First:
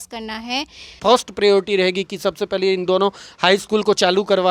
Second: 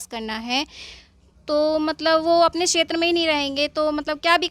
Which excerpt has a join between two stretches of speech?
first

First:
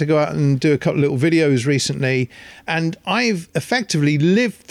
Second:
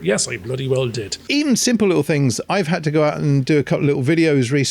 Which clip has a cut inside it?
second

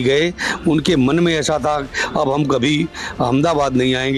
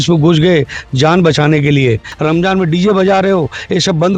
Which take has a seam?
second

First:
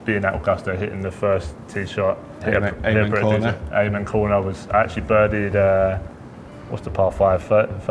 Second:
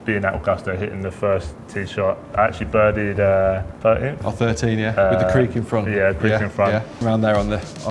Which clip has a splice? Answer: second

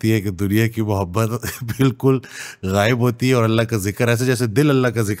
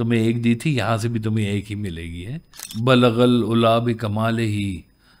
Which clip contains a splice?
second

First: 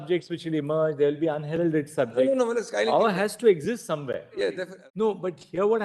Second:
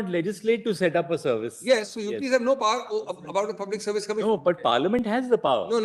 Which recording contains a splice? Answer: first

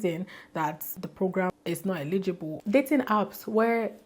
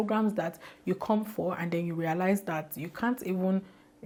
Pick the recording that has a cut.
first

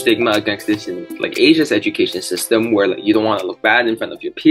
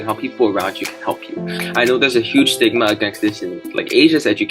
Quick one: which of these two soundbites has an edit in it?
second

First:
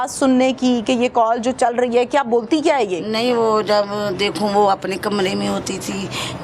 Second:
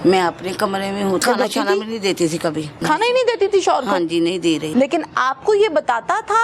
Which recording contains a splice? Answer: second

